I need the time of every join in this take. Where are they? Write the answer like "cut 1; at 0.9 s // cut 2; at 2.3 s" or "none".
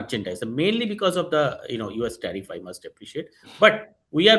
none

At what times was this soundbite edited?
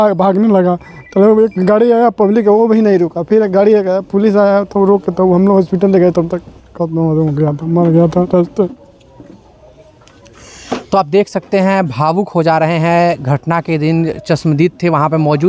none

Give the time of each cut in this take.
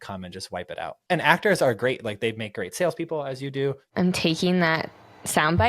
cut 1; at 1.0 s // cut 2; at 3.8 s

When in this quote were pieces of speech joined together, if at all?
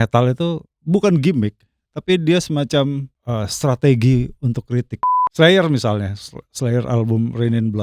cut 1; at 5.0 s

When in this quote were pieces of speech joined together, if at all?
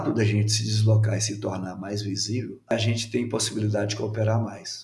cut 1; at 2.7 s

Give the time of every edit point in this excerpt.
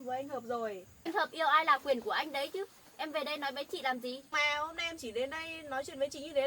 cut 1; at 1.0 s // cut 2; at 4.3 s

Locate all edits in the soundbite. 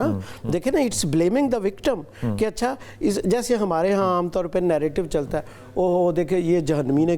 none

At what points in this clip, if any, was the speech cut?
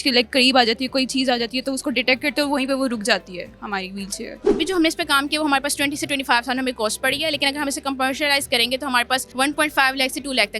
cut 1; at 4.3 s // cut 2; at 9.3 s

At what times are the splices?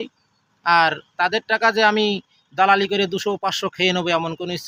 none

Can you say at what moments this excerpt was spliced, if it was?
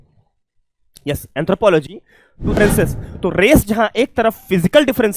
cut 1; at 2.6 s

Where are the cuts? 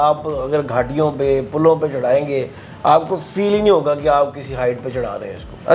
none

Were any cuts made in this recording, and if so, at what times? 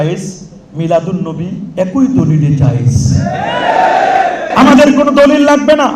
cut 1; at 4.5 s

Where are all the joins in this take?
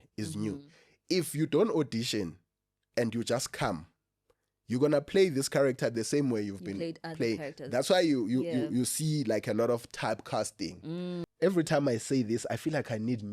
cut 1; at 11.2 s

